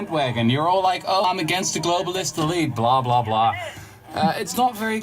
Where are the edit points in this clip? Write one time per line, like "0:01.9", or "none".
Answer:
0:01.2